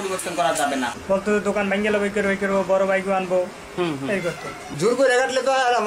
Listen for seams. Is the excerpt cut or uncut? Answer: cut